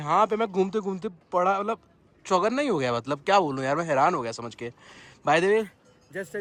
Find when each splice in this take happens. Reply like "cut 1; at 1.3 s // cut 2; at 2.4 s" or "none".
none